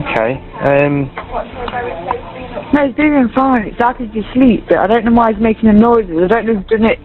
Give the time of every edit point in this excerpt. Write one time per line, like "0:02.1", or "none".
none